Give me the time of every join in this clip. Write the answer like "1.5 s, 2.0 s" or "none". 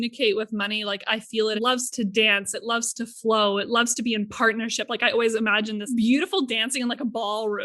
5.9 s

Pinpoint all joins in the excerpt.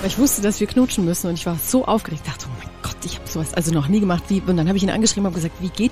none

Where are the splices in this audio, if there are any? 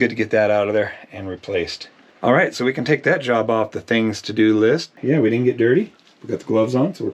4.9 s

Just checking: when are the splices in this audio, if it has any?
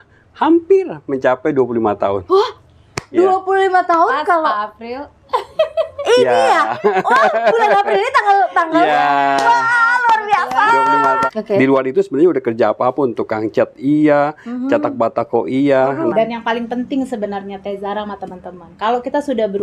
11.2 s, 16.1 s

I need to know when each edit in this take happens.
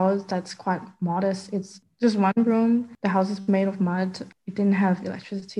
1.8 s, 4.2 s

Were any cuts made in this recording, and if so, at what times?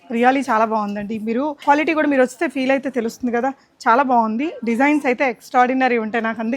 1.6 s

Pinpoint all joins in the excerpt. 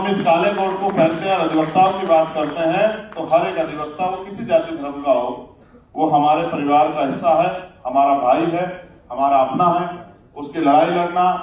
none

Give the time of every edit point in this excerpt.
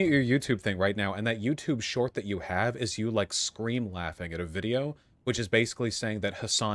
none

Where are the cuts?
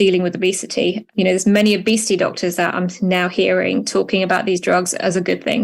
none

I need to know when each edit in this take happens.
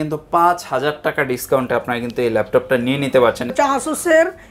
3.4 s

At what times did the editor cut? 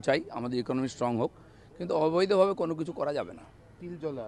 none

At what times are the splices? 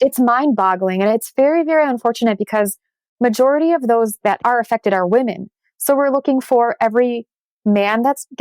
4.3 s

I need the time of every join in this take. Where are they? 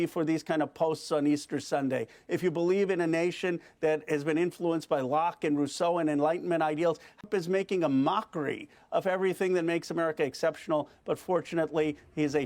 7.2 s

